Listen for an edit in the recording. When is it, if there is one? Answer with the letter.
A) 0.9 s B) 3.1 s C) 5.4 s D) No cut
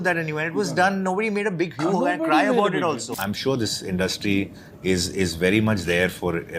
B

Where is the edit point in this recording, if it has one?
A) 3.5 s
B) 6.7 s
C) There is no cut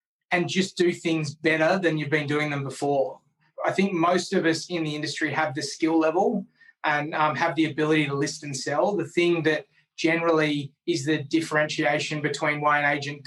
A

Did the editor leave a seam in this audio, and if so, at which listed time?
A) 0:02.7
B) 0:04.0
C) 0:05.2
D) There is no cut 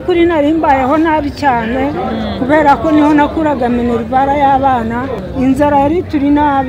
C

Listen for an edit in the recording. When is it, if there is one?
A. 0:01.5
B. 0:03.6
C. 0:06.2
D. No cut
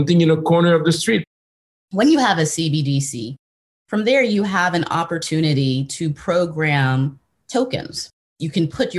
A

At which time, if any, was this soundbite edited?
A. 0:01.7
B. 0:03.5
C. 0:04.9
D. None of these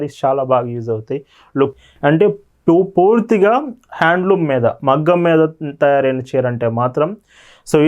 A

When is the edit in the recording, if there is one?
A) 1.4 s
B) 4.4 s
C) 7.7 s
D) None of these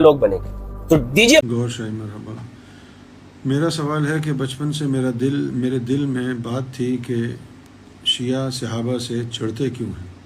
A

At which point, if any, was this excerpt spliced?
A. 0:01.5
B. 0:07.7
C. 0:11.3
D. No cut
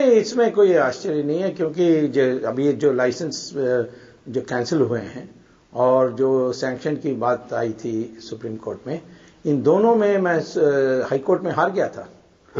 C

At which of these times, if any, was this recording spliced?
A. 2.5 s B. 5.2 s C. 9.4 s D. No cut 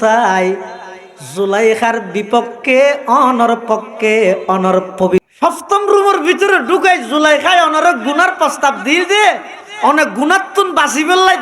B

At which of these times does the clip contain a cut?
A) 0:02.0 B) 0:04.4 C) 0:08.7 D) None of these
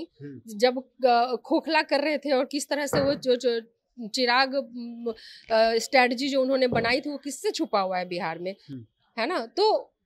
D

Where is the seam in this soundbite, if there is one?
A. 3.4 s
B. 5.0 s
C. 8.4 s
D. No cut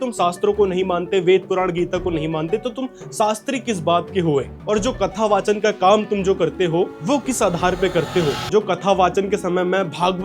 C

